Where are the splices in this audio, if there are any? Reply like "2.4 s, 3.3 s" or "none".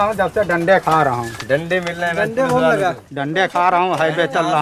none